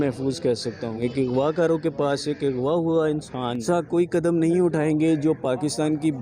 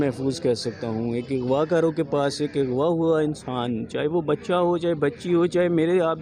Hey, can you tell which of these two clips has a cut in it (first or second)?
first